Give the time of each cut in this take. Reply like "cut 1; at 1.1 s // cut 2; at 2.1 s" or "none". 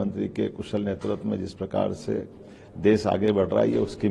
none